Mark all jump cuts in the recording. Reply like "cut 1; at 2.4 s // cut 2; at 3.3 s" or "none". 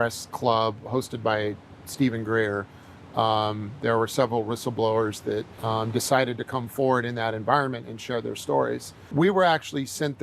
cut 1; at 5.5 s // cut 2; at 8.9 s